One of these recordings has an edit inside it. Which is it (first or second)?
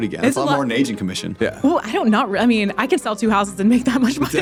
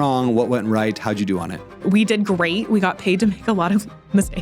second